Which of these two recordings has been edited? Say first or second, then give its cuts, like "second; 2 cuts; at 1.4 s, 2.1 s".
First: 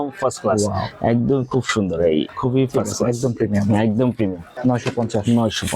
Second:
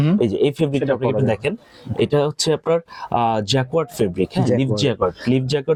first; 2 cuts; at 2.3 s, 4.5 s